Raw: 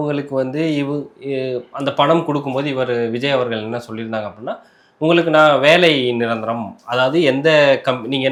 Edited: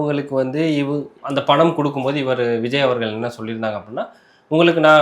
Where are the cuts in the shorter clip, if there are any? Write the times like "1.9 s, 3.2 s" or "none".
1.2 s